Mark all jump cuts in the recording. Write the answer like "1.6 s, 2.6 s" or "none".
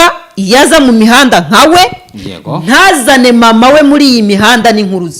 none

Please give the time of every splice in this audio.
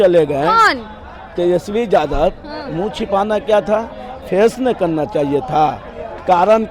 none

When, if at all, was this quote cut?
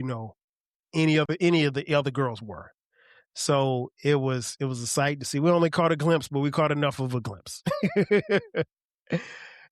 none

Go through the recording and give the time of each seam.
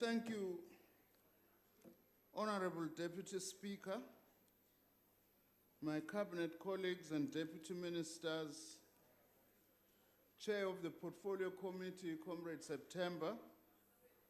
11.8 s

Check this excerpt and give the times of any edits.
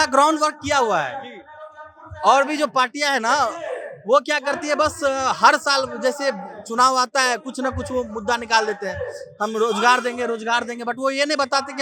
none

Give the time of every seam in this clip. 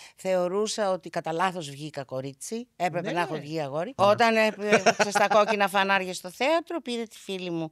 3.9 s

